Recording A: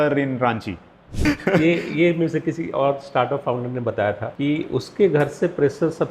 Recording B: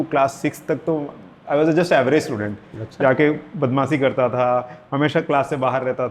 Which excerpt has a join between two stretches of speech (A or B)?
A